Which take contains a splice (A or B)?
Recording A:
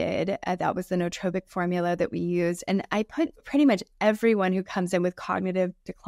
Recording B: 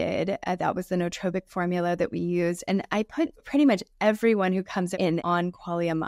B